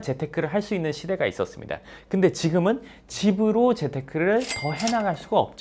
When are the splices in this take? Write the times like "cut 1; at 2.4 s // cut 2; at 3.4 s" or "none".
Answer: none